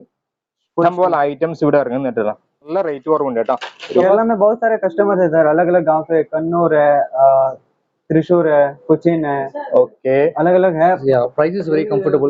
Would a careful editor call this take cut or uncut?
cut